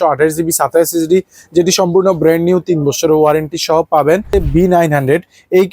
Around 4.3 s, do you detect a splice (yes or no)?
yes